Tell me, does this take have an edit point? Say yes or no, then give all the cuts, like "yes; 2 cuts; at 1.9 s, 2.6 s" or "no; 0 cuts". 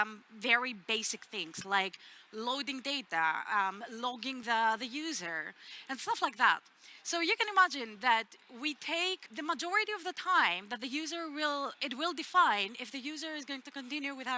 yes; 2 cuts; at 4.4 s, 9.3 s